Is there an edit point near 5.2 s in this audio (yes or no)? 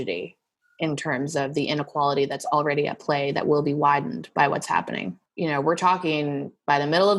yes